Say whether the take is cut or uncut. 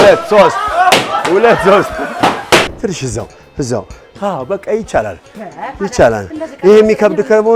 cut